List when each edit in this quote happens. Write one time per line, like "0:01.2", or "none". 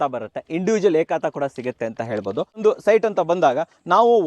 0:02.6